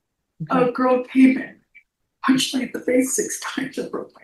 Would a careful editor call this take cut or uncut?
uncut